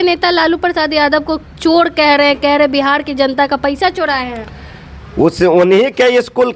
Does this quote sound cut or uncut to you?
uncut